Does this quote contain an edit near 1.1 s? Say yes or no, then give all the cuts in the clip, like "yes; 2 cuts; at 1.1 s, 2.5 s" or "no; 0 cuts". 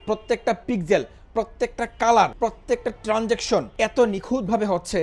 no; 2 cuts; at 2.3 s, 3.7 s